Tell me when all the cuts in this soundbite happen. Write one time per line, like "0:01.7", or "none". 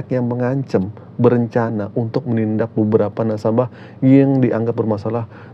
none